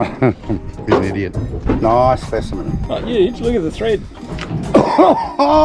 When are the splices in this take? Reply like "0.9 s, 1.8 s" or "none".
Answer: 1.1 s, 2.7 s